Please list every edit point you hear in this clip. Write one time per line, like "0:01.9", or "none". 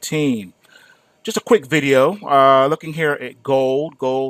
0:01.8